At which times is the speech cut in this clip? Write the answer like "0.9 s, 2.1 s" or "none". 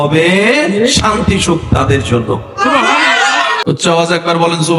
3.5 s